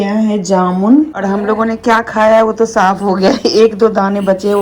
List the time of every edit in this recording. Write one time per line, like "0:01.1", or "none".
0:01.2